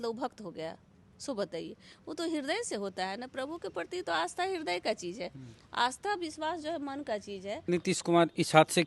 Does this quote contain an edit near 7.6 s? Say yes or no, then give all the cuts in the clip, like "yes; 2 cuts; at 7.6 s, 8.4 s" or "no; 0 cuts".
yes; 1 cut; at 7.6 s